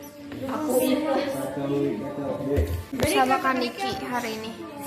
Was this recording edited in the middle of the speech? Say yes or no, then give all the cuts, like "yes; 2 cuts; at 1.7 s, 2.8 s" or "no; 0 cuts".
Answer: yes; 1 cut; at 2.9 s